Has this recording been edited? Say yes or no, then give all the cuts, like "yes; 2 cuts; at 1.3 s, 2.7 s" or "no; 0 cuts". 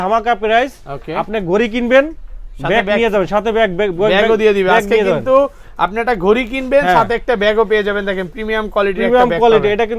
no; 0 cuts